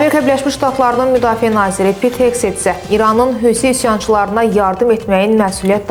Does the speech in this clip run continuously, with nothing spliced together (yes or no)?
yes